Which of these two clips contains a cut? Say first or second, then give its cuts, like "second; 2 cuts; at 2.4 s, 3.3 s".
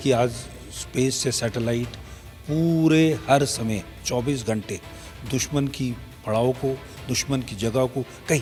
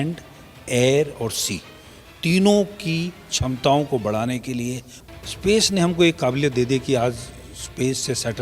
second; 1 cut; at 4.9 s